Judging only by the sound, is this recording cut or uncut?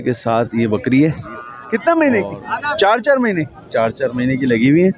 cut